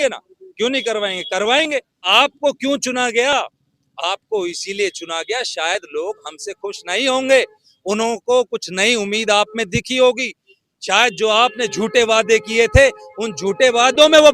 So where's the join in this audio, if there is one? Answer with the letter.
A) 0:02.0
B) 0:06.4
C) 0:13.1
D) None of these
A